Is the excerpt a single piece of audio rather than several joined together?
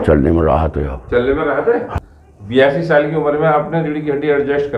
yes; 0 cuts

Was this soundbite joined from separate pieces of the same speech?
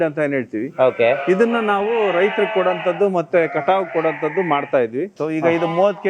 yes; 1 cut; at 5.1 s

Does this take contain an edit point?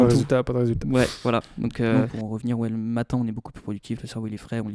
yes; 1 cut; at 1.9 s

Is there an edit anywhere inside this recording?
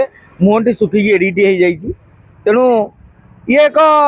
no; 0 cuts

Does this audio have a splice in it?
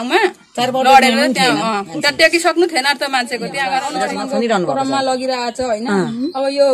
yes; 1 cut; at 3.9 s

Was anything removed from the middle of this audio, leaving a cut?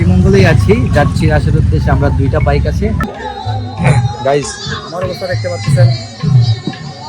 yes; 1 cut; at 3.1 s

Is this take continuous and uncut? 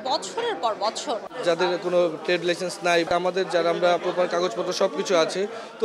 no; 3 cuts; at 1.3 s, 3.1 s, 4.0 s

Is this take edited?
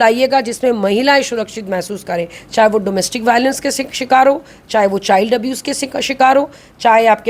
no; 0 cuts

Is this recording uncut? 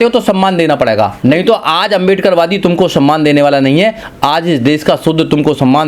no; 1 cut; at 1.1 s

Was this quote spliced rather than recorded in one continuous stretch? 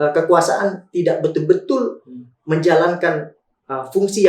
no; 0 cuts

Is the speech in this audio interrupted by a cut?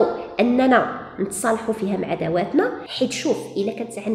yes; 1 cut; at 2.8 s

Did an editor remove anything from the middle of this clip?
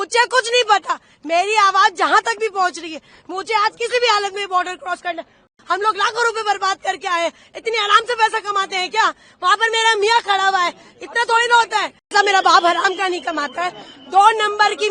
yes; 2 cuts; at 5.5 s, 12.1 s

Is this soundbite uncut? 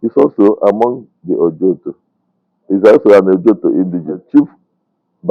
no; 1 cut; at 4.2 s

